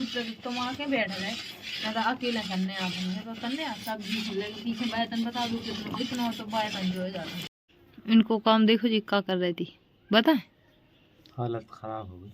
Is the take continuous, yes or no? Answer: no